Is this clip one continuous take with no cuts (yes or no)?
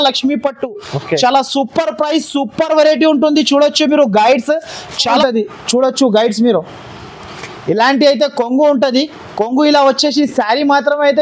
no